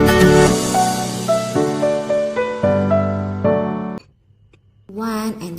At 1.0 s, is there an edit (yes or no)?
yes